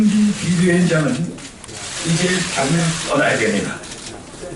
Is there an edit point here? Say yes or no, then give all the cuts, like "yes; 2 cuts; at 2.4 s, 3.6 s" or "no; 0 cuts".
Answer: yes; 1 cut; at 1.9 s